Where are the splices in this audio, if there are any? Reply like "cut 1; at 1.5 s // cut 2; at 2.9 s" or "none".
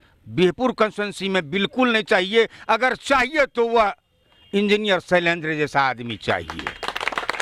none